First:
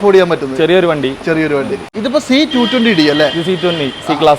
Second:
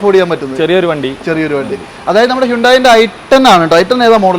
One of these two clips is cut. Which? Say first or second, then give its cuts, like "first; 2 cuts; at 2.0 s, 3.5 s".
first; 1 cut; at 1.9 s